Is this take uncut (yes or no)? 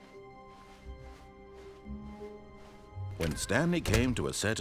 no